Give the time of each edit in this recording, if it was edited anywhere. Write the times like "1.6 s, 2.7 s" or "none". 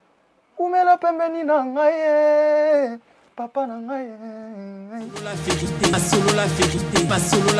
5.3 s